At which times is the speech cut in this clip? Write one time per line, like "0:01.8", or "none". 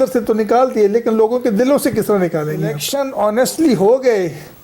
0:02.8